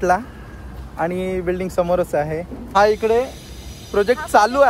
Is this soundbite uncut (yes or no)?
no